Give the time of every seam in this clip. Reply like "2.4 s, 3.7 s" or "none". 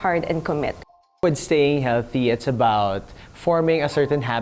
1.2 s